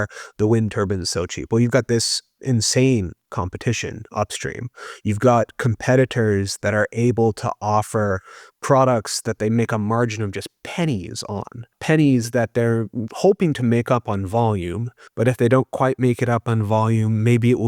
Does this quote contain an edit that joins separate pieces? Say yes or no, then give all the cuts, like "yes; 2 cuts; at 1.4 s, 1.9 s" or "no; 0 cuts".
yes; 1 cut; at 11.8 s